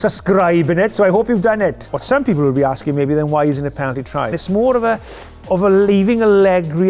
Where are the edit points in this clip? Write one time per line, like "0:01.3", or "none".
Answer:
0:01.9
0:04.4